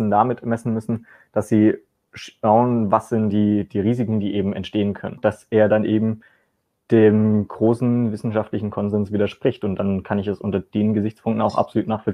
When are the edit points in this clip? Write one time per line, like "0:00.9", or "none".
0:05.2